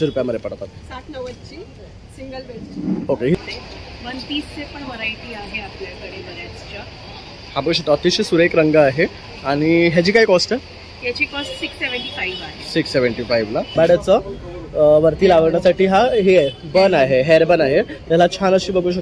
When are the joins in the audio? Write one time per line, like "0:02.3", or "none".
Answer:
0:03.4
0:13.7